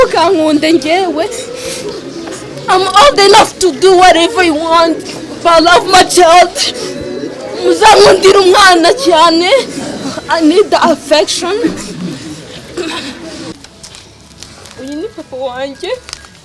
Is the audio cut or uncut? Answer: cut